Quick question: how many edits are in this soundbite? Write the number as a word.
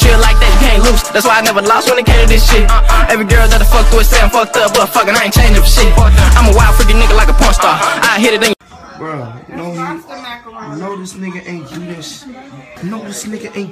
zero